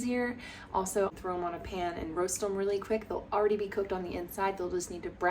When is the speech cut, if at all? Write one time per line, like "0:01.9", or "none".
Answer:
0:01.1